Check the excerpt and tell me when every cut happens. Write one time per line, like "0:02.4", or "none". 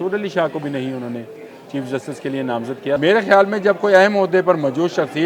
0:03.0